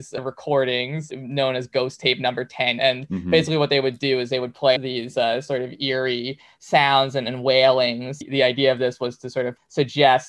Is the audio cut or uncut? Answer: cut